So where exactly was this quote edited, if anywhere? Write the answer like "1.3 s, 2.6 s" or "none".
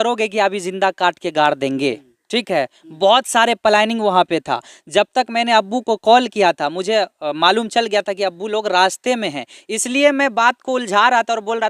none